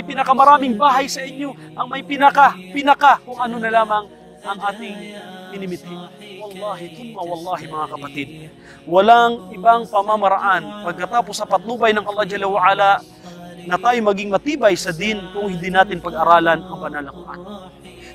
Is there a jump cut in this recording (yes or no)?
yes